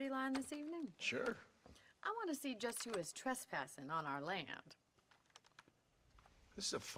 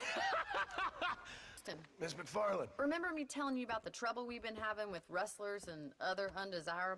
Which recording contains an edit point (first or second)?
second